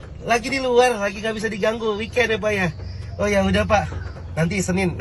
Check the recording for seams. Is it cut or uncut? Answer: uncut